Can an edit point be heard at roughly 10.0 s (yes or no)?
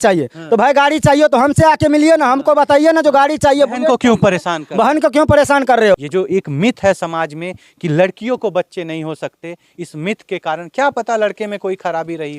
no